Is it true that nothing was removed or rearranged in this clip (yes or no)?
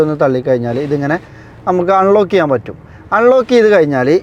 yes